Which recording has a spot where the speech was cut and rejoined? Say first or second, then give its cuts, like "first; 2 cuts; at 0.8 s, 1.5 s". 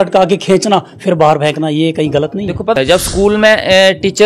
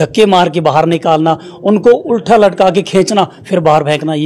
first; 1 cut; at 2.7 s